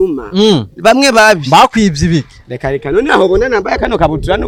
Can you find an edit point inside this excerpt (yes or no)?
no